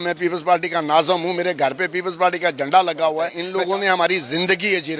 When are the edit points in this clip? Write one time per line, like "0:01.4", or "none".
0:03.4